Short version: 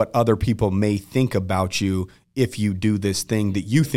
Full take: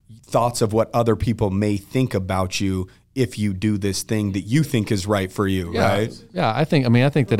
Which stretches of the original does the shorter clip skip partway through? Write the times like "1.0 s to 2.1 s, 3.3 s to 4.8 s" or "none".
none